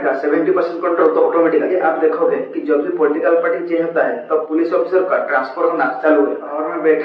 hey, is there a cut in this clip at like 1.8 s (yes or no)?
no